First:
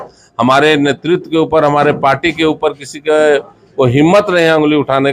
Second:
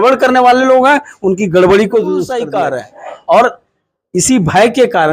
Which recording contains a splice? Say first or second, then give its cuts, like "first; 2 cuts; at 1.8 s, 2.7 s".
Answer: second; 1 cut; at 2.4 s